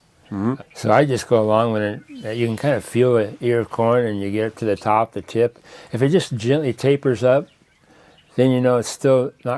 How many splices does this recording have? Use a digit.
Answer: 0